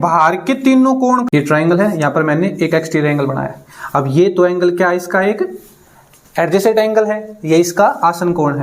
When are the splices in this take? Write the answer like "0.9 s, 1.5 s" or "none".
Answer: 1.3 s